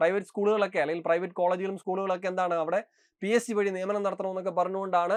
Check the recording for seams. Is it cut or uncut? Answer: uncut